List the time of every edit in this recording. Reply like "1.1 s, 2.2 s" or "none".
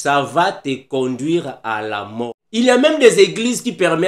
2.4 s